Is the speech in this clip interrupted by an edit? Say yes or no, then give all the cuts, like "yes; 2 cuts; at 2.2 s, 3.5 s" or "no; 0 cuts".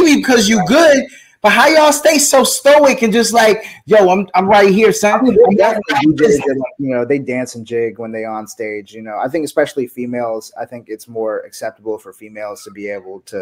no; 0 cuts